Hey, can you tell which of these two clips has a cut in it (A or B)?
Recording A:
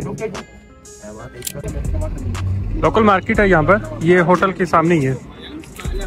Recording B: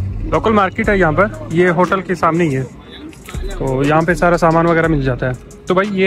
A